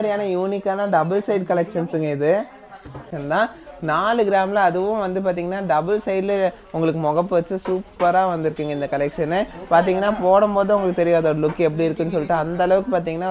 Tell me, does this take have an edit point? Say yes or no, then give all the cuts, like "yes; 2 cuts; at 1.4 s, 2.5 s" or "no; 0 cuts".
yes; 1 cut; at 3.1 s